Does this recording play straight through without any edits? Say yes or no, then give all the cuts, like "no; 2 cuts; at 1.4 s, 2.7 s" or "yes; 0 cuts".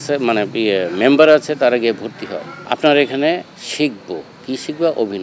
yes; 0 cuts